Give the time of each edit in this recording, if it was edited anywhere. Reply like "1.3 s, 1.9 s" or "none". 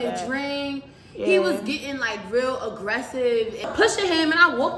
3.7 s